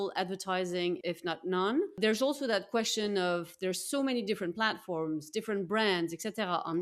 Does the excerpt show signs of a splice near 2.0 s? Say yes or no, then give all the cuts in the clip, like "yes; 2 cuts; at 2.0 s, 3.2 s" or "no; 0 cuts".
yes; 2 cuts; at 1.0 s, 2.0 s